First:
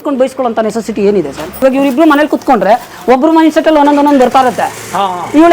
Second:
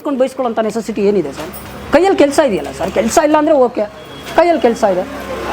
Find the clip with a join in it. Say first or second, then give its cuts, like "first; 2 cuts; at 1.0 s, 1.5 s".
first; 1 cut; at 1.6 s